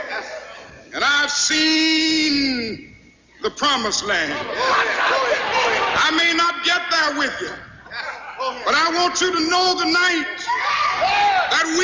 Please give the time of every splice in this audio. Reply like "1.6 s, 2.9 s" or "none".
none